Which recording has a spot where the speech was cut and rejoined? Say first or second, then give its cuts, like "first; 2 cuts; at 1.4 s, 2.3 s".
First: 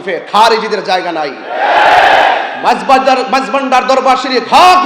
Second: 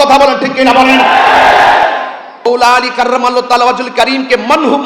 second; 1 cut; at 2.5 s